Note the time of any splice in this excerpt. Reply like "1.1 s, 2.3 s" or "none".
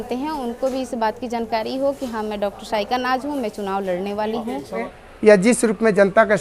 5.0 s